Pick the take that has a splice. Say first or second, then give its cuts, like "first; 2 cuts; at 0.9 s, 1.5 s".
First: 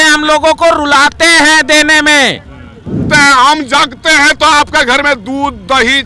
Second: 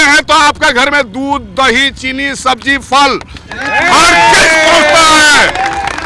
first; 1 cut; at 3.0 s